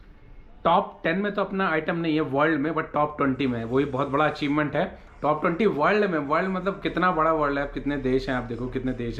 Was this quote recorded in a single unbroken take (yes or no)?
yes